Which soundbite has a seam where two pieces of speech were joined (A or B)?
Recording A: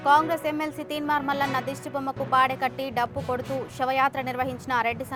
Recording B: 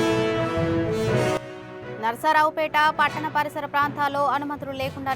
B